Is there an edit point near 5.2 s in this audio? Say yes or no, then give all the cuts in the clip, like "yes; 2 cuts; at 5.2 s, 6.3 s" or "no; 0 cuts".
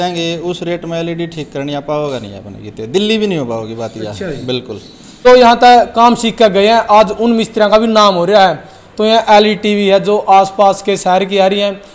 yes; 1 cut; at 5.2 s